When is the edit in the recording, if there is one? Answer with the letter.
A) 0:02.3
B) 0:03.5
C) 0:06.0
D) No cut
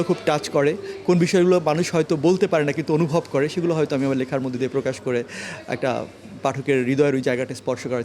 D